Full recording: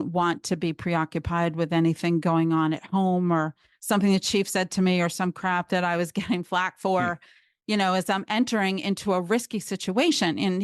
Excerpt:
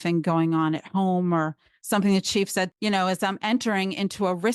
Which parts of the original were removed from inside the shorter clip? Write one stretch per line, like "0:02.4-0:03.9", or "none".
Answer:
0:04.7-0:07.6